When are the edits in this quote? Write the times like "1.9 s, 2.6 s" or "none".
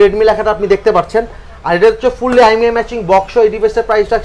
none